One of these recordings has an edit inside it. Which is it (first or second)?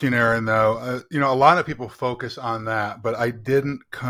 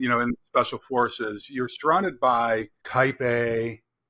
second